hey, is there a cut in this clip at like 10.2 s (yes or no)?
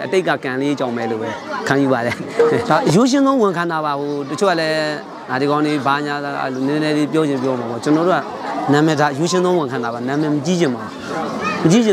no